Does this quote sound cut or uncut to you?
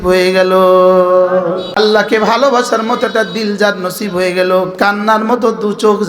cut